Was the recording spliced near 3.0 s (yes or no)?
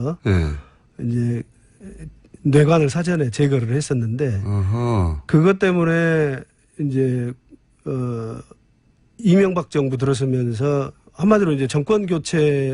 no